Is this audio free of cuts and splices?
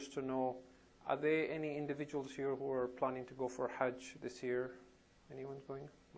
no; 1 cut; at 4.5 s

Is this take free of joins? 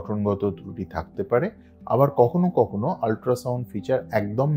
yes; 0 cuts

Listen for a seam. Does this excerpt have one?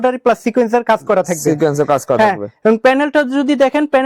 no; 0 cuts

